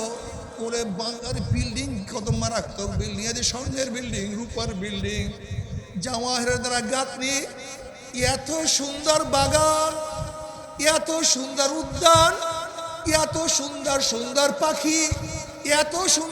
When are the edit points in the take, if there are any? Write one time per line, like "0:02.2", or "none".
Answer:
none